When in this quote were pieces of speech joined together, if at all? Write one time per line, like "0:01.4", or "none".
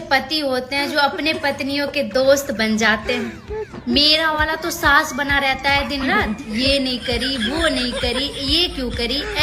none